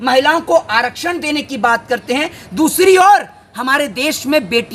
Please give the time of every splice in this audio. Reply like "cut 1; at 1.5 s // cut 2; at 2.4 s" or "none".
none